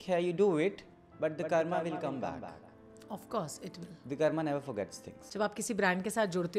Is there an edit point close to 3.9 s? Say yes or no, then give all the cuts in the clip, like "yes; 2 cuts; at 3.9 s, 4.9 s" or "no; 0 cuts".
no; 1 cut; at 5.2 s